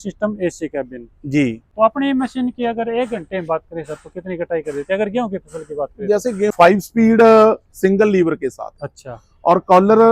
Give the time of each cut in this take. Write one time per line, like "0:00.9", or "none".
0:01.6
0:06.5